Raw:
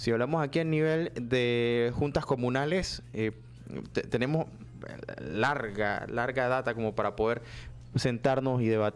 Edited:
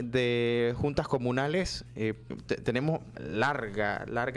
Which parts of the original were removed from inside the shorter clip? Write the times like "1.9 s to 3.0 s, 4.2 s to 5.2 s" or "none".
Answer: 3.5 s to 3.8 s, 4.6 s to 5.2 s